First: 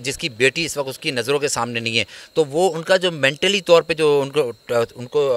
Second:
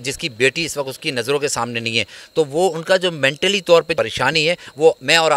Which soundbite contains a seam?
second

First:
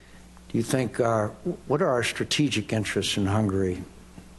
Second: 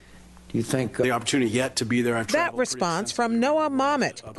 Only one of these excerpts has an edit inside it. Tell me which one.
first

